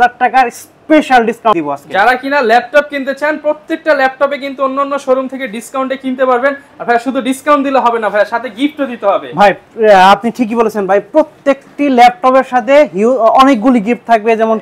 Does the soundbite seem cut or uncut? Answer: uncut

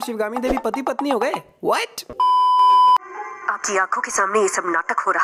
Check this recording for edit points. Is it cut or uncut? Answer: uncut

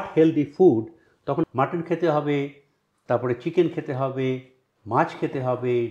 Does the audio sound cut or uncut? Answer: cut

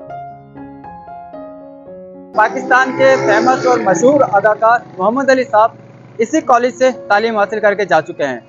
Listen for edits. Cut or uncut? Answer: cut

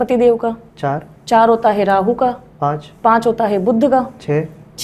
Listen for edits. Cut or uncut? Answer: uncut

